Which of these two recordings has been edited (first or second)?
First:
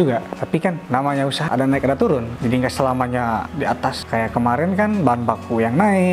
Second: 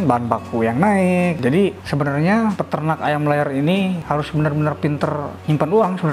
first